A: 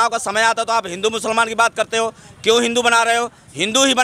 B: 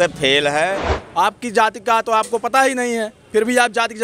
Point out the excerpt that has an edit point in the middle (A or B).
B